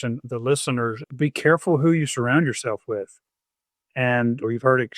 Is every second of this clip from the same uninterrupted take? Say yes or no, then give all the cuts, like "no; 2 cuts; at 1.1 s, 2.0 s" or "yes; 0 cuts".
no; 1 cut; at 1.0 s